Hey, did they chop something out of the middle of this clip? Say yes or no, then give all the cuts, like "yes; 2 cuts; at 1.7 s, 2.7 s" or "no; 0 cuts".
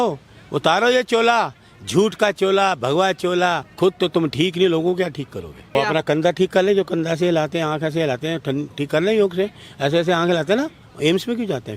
yes; 3 cuts; at 3.7 s, 5.7 s, 10.8 s